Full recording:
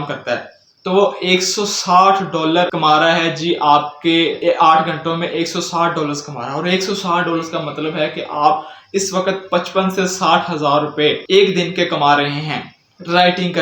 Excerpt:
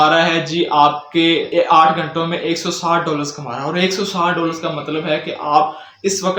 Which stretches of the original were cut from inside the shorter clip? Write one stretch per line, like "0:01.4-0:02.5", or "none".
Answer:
none